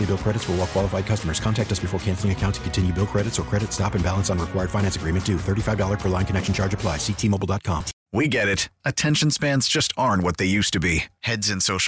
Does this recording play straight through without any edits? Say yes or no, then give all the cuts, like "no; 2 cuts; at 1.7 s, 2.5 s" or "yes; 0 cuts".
no; 1 cut; at 8.0 s